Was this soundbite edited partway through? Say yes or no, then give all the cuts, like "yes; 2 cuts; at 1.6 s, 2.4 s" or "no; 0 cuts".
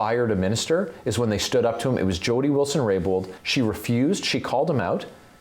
yes; 1 cut; at 3.4 s